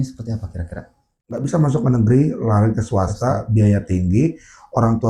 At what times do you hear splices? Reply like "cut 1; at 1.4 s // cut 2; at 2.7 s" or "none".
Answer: cut 1; at 1.1 s